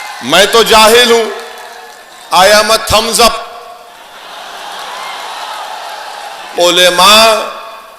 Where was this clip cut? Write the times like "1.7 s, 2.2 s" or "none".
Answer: 6.5 s